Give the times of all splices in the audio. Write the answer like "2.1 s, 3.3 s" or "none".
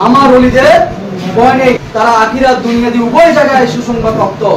1.8 s